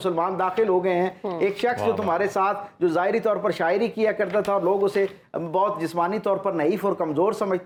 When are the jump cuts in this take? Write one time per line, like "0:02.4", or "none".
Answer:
none